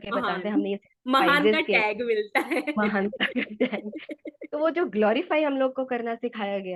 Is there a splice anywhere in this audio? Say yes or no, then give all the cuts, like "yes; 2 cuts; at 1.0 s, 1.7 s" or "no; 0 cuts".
no; 0 cuts